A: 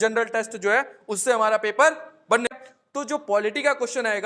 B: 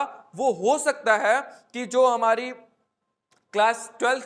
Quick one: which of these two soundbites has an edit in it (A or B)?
A